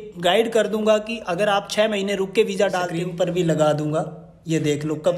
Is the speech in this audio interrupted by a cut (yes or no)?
yes